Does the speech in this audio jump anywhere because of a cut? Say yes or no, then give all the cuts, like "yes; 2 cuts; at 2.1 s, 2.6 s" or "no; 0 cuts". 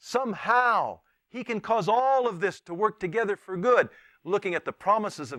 no; 0 cuts